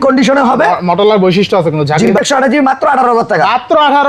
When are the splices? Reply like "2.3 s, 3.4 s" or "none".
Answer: 2.1 s